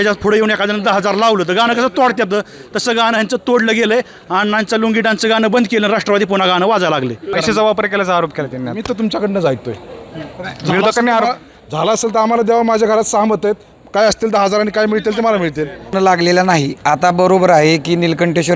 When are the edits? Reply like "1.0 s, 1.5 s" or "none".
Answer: 7.3 s, 15.9 s